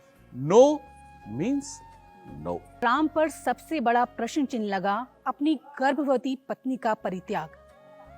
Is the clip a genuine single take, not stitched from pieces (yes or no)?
no